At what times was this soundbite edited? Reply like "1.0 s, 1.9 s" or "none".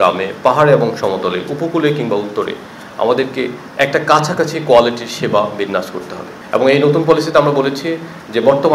none